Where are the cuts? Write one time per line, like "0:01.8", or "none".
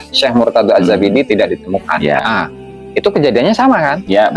0:02.2